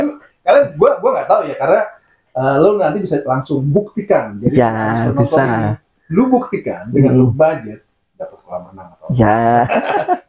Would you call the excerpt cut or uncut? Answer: uncut